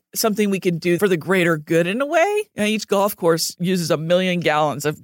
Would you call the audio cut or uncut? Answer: cut